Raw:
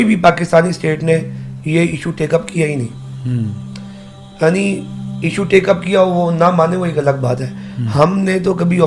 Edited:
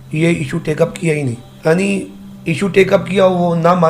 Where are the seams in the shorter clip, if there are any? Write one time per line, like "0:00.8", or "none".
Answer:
0:01.5